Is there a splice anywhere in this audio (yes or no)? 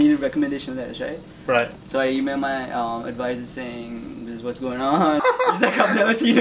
yes